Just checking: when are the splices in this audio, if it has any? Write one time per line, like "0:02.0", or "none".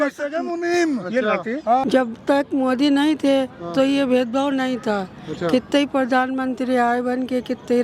0:01.8